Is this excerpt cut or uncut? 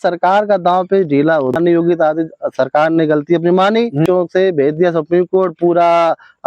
cut